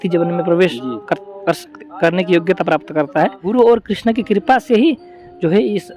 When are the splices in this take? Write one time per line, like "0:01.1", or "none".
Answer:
0:03.4